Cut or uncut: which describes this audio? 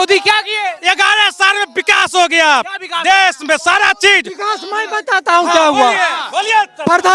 uncut